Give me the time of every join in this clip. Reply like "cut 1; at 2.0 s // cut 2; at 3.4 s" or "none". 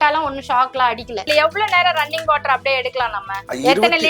cut 1; at 1.2 s